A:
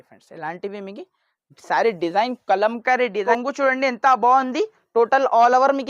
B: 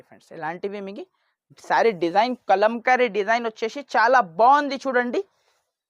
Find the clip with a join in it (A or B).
A